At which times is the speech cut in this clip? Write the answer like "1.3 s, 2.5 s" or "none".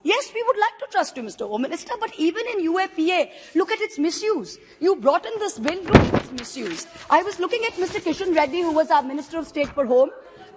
none